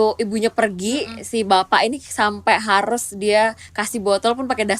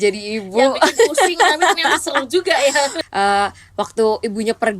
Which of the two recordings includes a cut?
second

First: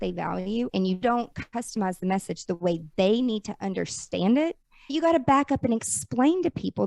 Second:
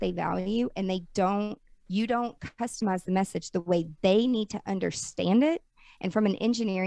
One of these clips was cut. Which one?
first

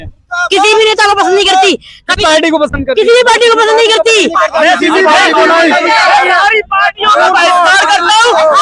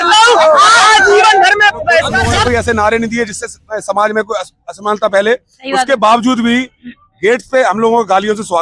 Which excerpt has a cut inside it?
second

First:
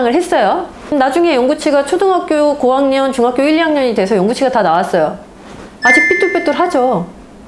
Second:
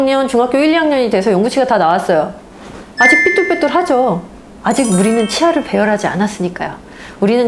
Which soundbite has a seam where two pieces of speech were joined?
first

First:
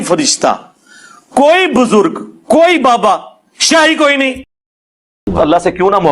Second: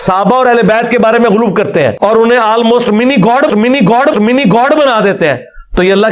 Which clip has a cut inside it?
first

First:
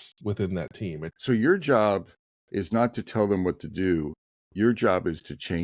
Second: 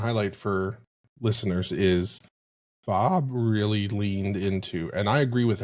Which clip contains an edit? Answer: first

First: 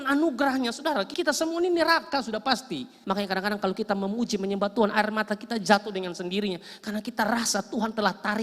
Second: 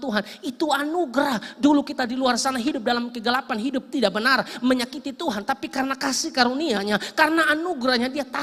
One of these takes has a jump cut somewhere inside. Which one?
first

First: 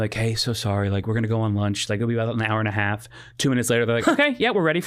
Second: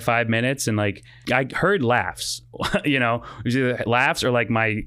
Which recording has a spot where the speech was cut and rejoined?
second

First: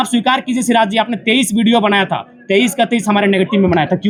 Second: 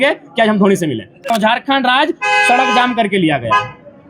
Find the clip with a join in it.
second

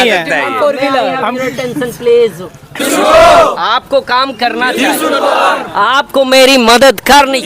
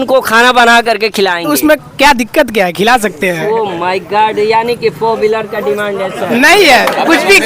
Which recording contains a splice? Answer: first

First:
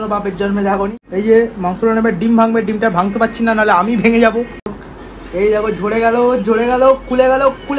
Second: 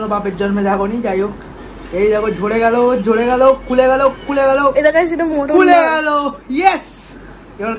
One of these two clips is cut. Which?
first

